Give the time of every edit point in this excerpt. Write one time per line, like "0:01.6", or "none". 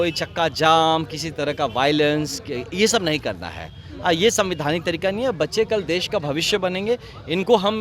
none